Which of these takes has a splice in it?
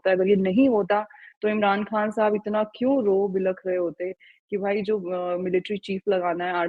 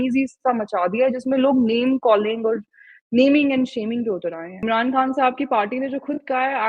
second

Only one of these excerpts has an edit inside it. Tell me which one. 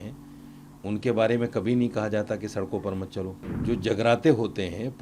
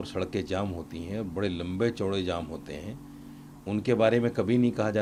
first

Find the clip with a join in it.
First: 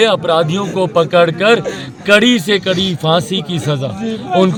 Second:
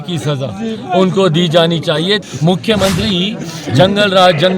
second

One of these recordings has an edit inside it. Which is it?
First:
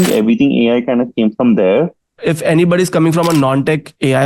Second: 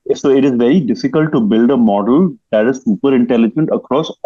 first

